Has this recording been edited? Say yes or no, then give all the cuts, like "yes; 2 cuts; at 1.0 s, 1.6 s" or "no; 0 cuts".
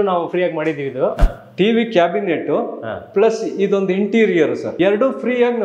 yes; 2 cuts; at 1.2 s, 4.7 s